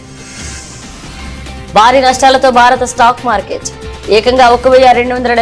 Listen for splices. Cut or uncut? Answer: uncut